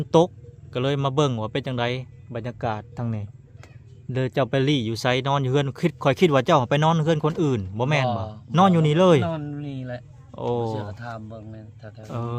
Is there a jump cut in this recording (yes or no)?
no